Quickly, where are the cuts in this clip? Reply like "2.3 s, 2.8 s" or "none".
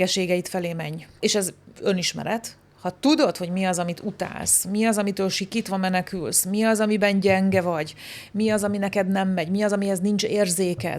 1.2 s